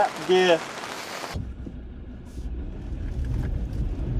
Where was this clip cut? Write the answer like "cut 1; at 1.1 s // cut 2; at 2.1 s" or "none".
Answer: cut 1; at 1.3 s